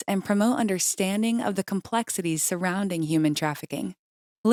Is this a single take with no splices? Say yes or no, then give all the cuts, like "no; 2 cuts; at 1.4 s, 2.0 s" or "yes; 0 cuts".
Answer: yes; 0 cuts